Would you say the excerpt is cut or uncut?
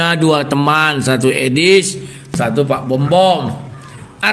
cut